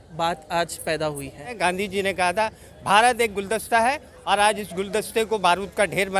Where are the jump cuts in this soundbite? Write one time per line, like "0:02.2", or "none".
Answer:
0:01.5